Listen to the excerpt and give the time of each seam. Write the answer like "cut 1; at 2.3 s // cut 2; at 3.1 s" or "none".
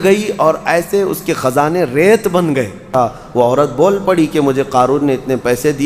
cut 1; at 2.9 s

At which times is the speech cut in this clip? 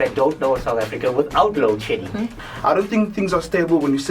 cut 1; at 2.3 s

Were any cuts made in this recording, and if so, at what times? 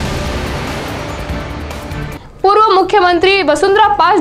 cut 1; at 1.4 s

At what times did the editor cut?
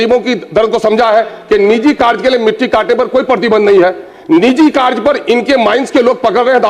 none

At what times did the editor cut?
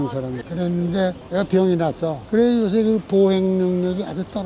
cut 1; at 2.2 s

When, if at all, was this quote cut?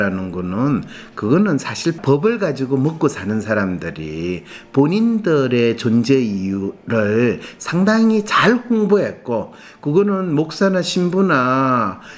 cut 1; at 2.0 s

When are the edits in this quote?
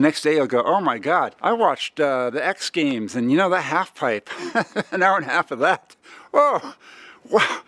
cut 1; at 1.3 s

